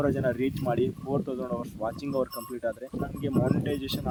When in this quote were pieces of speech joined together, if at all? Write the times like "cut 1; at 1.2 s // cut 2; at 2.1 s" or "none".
none